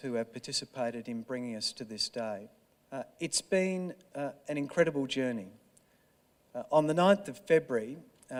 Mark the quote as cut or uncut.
uncut